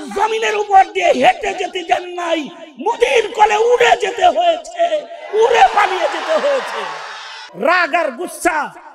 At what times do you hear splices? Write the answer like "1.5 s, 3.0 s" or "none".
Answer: 7.4 s

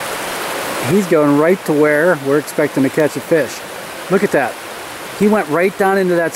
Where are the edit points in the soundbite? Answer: none

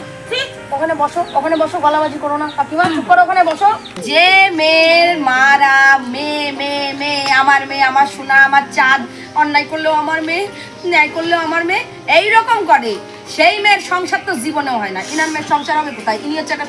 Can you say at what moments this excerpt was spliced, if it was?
3.9 s

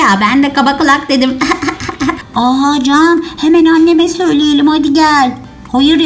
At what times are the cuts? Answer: 2.2 s

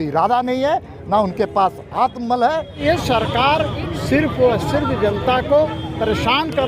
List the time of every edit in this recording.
2.7 s

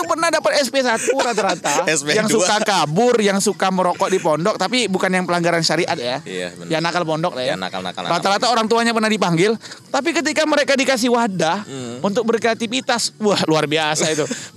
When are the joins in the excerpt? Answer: none

